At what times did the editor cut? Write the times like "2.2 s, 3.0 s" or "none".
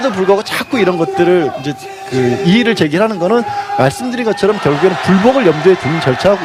4.0 s